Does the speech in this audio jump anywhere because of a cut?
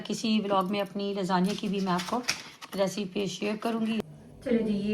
yes; 1 cut; at 4.0 s

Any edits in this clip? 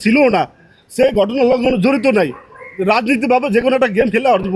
no; 0 cuts

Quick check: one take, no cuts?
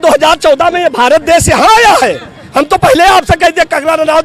yes; 0 cuts

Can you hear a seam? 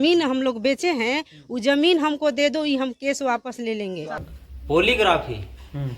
yes; 1 cut; at 4.3 s

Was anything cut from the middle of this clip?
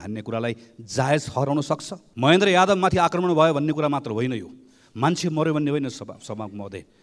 yes; 1 cut; at 2.0 s

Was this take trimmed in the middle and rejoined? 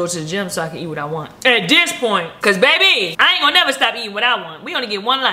yes; 3 cuts; at 1.3 s, 2.3 s, 3.1 s

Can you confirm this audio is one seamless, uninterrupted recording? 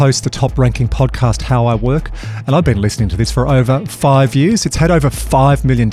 yes; 0 cuts

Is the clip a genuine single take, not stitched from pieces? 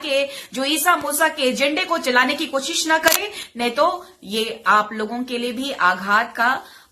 yes; 0 cuts

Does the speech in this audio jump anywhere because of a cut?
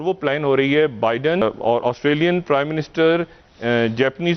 yes; 1 cut; at 1.4 s

